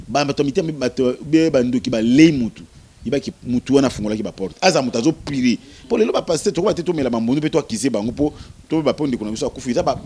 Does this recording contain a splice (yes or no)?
no